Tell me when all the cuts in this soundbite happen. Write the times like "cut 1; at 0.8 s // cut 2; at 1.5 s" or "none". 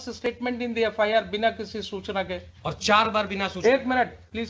none

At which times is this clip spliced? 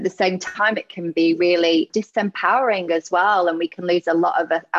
cut 1; at 1.9 s

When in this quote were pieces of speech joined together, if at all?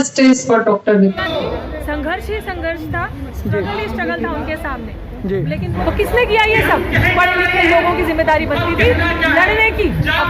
cut 1; at 1.2 s // cut 2; at 5.8 s

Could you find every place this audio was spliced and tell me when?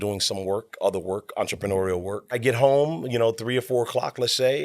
cut 1; at 2.4 s

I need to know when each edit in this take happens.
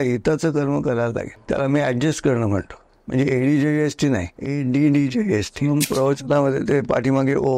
cut 1; at 1.4 s // cut 2; at 2.9 s // cut 3; at 4.4 s // cut 4; at 5.7 s

